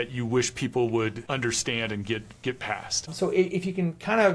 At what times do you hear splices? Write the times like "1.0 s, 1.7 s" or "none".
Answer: 1.2 s, 3.1 s